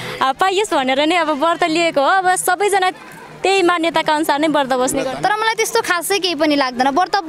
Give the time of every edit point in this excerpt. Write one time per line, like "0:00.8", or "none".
0:05.1